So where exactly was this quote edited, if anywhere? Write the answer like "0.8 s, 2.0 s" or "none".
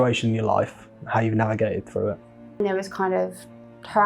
2.6 s